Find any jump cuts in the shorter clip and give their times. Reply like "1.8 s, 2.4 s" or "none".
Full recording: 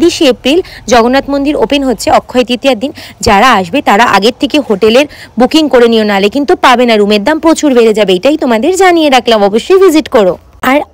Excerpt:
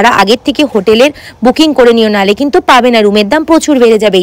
none